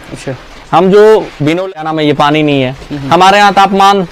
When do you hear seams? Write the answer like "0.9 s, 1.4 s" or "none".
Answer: 1.6 s